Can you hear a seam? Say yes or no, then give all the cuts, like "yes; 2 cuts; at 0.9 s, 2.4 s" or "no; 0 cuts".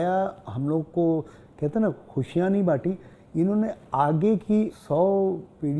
yes; 1 cut; at 4.8 s